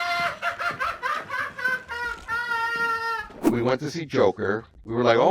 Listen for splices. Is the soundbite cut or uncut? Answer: cut